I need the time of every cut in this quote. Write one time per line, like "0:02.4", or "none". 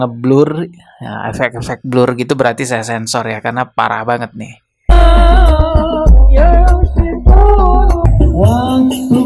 0:08.1